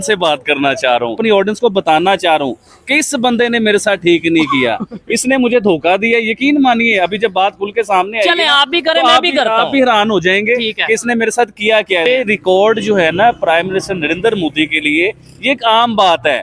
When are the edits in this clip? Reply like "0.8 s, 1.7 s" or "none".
1.2 s, 12.1 s